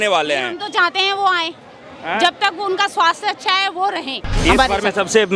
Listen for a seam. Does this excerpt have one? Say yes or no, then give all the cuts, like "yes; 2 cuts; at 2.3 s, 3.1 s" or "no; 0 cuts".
yes; 1 cut; at 4.3 s